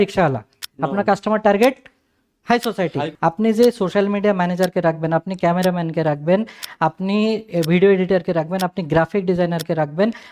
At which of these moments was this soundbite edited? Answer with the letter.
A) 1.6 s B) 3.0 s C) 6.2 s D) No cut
B